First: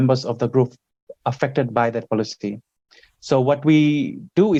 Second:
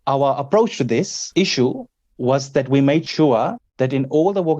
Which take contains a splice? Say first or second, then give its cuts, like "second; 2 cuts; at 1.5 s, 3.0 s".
second; 3 cuts; at 1.2 s, 3.1 s, 3.6 s